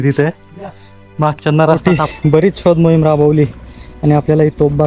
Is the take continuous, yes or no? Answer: no